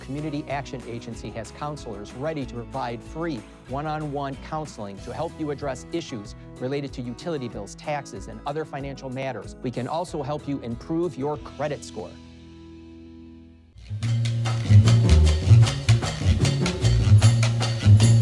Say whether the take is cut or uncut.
cut